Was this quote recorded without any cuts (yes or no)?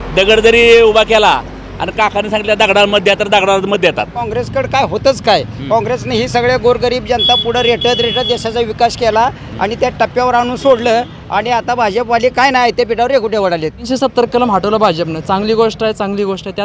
no